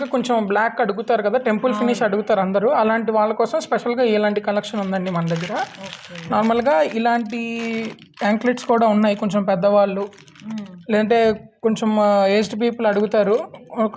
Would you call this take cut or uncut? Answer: uncut